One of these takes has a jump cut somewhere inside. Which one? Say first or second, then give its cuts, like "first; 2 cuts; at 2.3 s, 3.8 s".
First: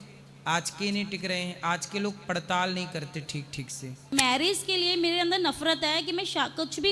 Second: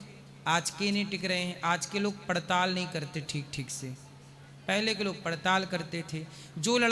first; 1 cut; at 4.0 s